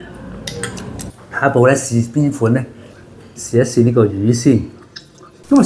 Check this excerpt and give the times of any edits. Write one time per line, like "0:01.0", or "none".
0:01.1